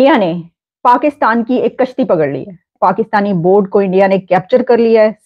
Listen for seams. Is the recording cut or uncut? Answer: cut